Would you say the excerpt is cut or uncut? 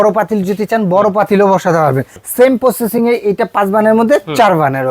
cut